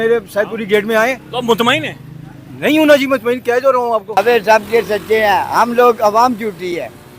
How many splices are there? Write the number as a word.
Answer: one